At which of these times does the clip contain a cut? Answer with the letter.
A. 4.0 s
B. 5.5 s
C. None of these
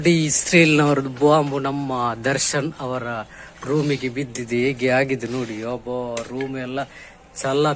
C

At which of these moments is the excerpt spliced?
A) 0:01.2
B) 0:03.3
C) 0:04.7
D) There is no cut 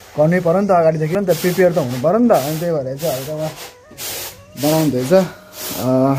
A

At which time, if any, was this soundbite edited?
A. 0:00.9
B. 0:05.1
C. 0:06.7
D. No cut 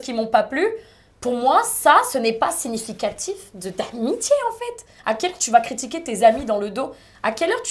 D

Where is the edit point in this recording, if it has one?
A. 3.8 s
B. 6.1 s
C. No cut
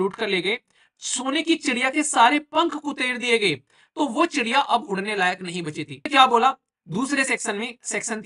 B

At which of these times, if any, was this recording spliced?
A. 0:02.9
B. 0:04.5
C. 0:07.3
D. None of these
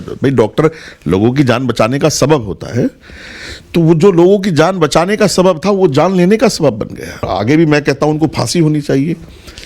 C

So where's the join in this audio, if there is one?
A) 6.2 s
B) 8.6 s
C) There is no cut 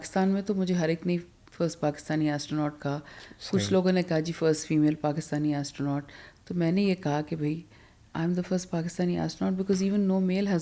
C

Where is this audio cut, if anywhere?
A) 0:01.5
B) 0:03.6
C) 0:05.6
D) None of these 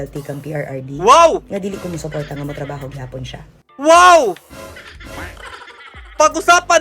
D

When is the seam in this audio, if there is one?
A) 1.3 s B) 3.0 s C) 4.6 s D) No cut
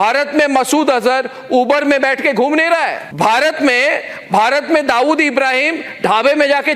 B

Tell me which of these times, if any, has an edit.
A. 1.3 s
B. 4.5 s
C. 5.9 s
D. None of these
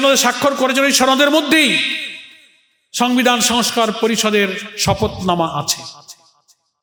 D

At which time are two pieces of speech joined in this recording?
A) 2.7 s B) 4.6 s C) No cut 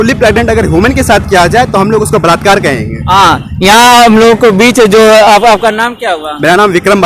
C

